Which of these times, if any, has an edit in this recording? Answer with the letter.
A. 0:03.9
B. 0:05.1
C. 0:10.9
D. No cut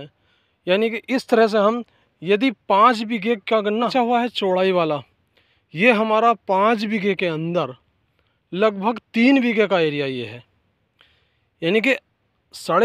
A